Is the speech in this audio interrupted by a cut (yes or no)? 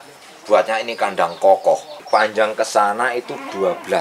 yes